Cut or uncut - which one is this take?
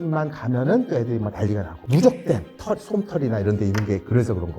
cut